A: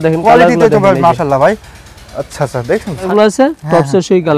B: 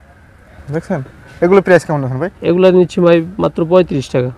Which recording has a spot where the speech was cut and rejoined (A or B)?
A